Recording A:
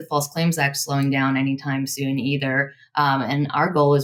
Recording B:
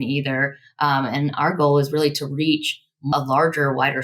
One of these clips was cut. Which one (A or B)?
B